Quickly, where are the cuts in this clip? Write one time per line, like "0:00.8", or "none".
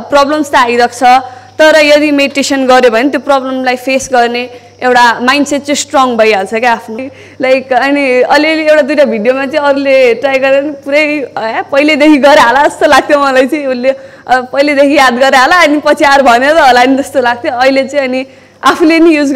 0:06.9